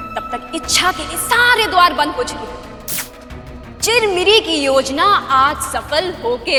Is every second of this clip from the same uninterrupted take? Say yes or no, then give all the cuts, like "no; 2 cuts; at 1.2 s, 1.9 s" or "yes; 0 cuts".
yes; 0 cuts